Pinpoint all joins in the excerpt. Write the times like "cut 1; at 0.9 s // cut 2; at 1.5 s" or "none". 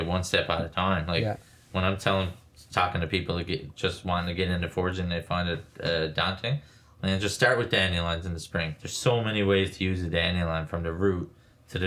cut 1; at 8.8 s